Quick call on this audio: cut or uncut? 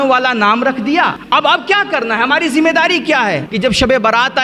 cut